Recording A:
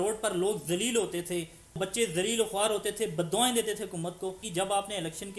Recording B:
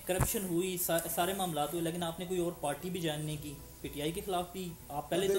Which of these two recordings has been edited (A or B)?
A